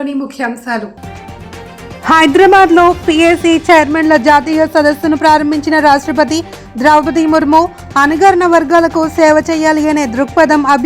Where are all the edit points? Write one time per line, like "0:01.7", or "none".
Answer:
0:01.0